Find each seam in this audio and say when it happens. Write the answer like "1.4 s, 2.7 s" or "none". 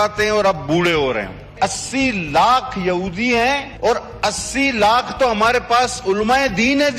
1.5 s, 3.7 s